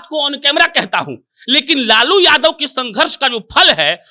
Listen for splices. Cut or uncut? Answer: uncut